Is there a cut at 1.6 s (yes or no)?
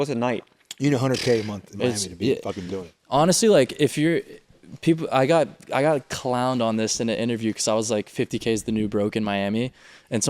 no